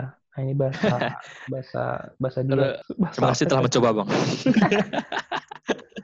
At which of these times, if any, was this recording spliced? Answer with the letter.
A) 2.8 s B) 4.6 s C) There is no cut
A